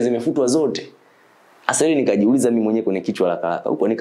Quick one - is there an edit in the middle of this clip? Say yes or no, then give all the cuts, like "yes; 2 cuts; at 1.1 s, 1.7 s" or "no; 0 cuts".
no; 0 cuts